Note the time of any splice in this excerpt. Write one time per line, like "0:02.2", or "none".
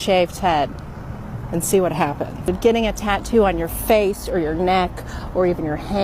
0:02.5